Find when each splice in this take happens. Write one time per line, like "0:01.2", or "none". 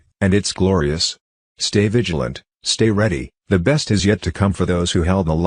none